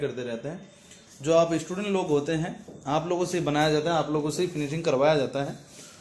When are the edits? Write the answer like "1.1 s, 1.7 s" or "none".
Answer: none